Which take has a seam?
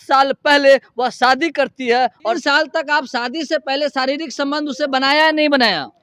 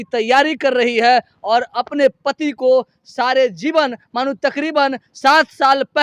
first; 1 cut; at 2.4 s

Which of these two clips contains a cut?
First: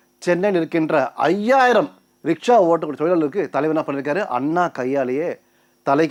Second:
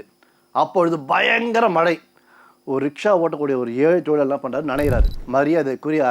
second; 1 cut; at 5.1 s

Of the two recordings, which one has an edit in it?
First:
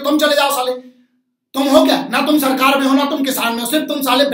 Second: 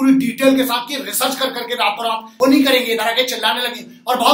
second; 1 cut; at 2.3 s

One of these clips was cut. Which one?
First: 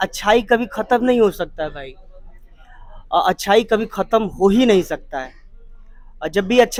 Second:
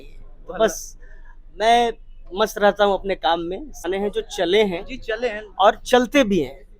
second; 1 cut; at 3.9 s

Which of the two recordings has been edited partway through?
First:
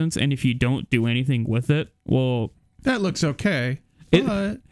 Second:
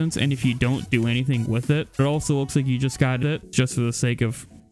second; 2 cuts; at 2.0 s, 3.3 s

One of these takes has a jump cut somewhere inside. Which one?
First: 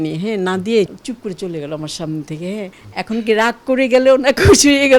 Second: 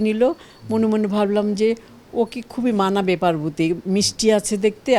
first; 2 cuts; at 0.9 s, 2.8 s

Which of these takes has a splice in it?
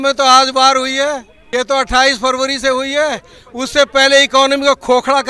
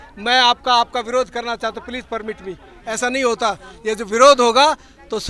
first; 1 cut; at 1.3 s

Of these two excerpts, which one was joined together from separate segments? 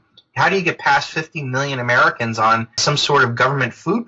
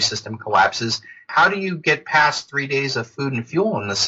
first; 1 cut; at 2.8 s

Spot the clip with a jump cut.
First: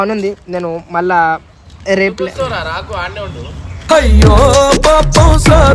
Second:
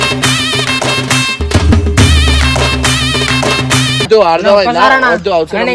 second; 1 cut; at 4.0 s

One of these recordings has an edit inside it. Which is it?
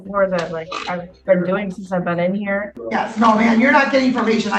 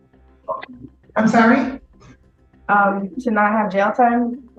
first; 1 cut; at 2.8 s

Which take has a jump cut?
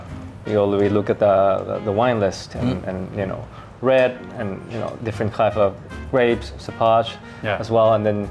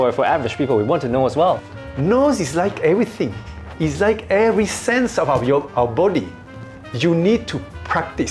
second; 1 cut; at 1.7 s

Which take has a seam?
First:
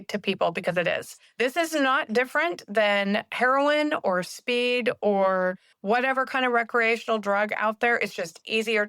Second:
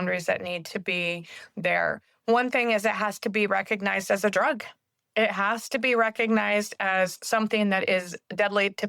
first; 2 cuts; at 1.2 s, 5.7 s

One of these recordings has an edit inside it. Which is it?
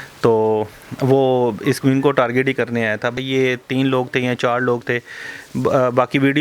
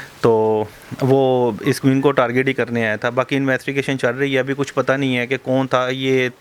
first; 1 cut; at 3.1 s

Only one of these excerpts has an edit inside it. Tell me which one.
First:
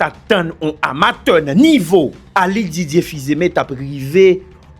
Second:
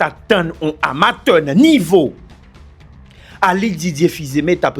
first; 1 cut; at 2.2 s

